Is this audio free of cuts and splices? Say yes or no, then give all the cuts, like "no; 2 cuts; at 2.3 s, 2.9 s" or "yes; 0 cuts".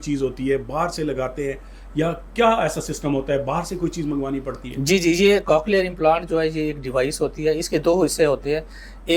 yes; 0 cuts